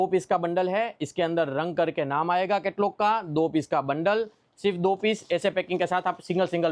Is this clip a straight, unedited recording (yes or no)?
yes